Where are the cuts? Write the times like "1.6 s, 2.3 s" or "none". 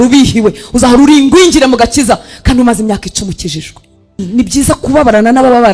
4.2 s